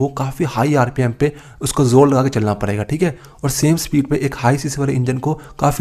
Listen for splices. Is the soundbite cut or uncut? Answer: uncut